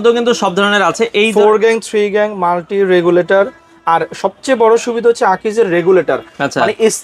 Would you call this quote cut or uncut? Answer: uncut